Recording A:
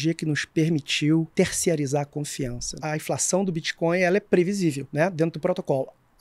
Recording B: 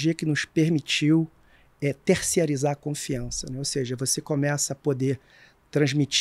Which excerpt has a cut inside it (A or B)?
A